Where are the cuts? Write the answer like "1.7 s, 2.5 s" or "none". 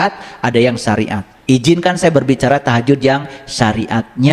none